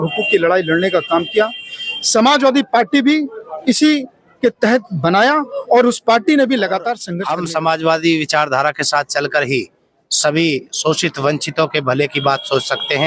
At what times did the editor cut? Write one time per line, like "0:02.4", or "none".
0:07.1